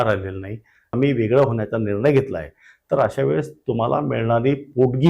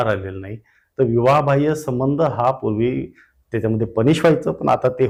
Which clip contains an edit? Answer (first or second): first